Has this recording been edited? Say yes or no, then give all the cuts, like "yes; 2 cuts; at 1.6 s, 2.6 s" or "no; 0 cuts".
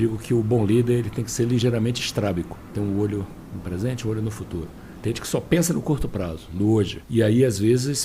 yes; 2 cuts; at 2.6 s, 7.0 s